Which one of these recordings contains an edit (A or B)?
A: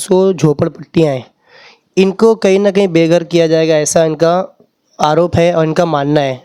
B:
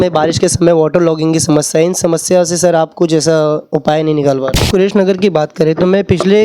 B